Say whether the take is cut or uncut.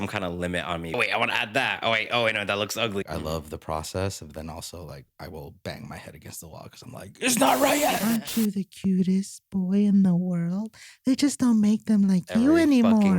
cut